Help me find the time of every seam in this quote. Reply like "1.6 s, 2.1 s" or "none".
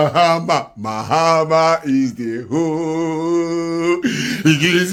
none